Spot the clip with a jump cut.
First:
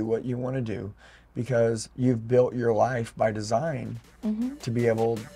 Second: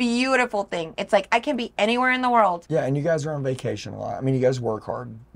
second; 1 cut; at 2.6 s

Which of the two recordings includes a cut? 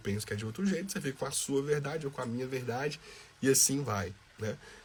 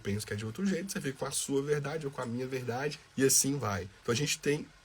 second; 2 cuts; at 3.0 s, 3.9 s

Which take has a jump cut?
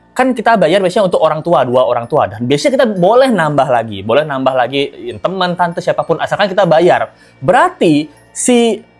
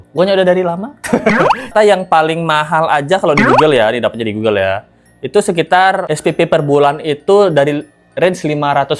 second; 1 cut; at 1.7 s

